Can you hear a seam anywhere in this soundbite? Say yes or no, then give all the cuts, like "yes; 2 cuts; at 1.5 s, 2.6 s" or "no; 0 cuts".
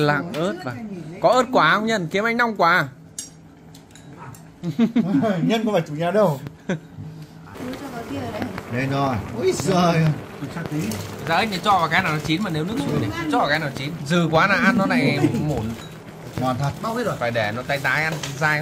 yes; 2 cuts; at 7.5 s, 13.9 s